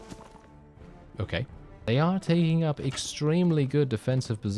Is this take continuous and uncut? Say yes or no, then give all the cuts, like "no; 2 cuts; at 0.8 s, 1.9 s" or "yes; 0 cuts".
no; 1 cut; at 1.8 s